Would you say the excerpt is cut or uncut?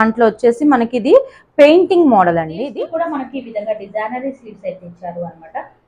cut